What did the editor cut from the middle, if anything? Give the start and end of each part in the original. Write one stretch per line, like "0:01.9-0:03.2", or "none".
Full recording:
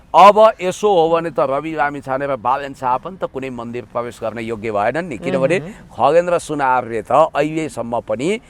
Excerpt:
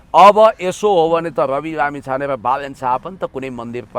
none